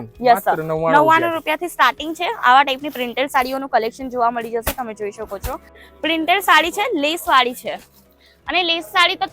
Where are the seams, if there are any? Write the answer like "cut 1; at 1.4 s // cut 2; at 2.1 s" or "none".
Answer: cut 1; at 5.8 s